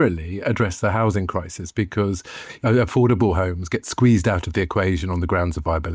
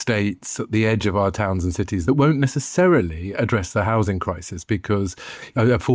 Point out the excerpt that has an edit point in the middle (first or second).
second